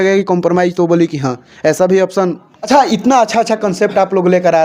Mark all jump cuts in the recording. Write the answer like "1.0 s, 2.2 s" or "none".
2.6 s